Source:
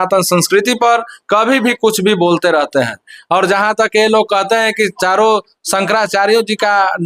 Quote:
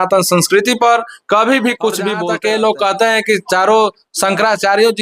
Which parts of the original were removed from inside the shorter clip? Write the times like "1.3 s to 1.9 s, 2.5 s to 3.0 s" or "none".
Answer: 2.2 s to 3.7 s